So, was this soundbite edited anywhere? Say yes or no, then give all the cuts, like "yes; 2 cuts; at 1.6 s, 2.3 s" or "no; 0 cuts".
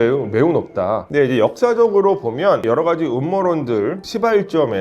yes; 1 cut; at 1.1 s